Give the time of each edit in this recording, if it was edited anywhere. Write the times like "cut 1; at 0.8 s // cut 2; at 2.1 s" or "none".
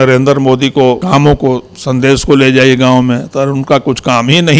cut 1; at 1.0 s